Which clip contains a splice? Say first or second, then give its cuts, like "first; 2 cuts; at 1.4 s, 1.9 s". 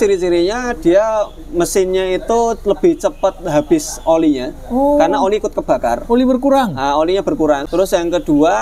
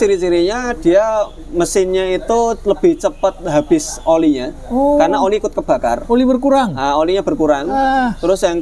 first; 1 cut; at 7.6 s